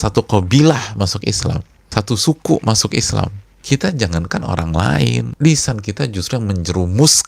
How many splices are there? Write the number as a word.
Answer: three